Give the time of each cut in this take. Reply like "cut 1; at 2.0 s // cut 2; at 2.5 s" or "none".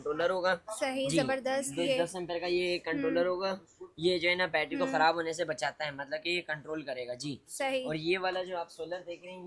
none